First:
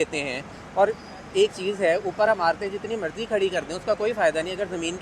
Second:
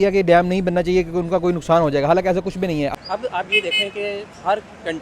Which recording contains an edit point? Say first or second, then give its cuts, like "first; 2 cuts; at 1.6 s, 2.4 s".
second; 1 cut; at 2.9 s